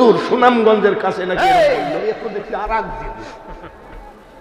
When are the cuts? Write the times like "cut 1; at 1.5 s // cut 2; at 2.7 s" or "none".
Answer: cut 1; at 1.3 s